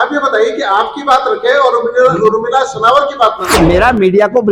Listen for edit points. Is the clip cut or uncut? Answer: cut